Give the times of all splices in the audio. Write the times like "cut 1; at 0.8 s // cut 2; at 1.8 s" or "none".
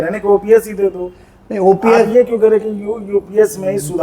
none